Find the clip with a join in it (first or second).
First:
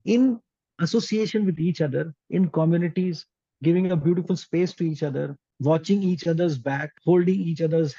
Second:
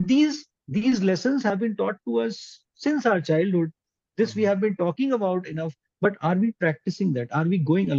first